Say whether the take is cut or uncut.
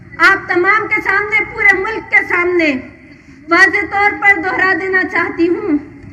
uncut